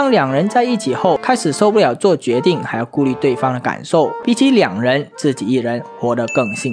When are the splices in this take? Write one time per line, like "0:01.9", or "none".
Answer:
0:01.2
0:04.2